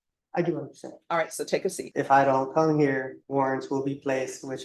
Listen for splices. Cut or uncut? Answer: cut